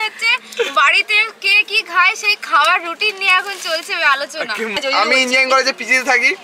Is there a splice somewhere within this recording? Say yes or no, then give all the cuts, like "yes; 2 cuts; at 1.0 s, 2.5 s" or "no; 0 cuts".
yes; 1 cut; at 4.8 s